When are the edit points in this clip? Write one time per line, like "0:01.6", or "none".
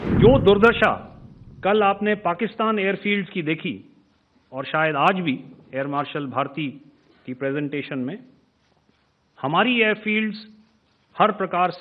none

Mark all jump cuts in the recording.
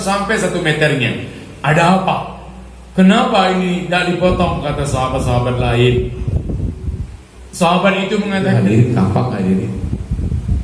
0:08.6

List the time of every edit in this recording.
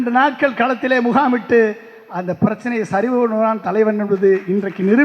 none

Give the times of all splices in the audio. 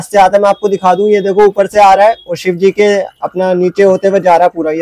none

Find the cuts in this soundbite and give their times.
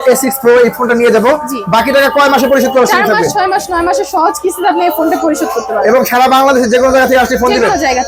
none

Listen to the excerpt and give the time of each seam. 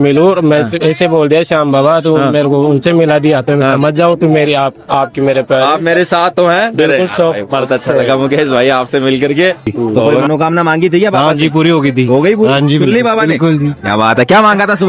0:10.1

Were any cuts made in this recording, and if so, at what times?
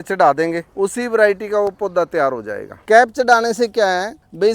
0:02.7

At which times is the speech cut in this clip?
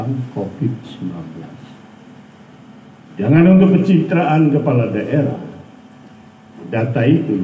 none

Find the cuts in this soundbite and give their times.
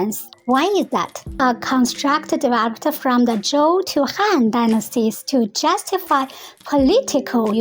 0:01.4

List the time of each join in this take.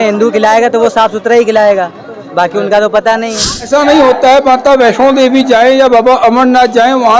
0:03.0

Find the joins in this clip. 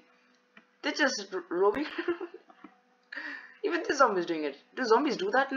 none

